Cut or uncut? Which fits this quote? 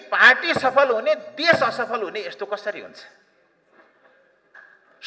uncut